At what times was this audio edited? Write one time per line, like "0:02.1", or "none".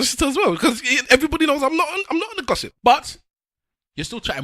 0:02.7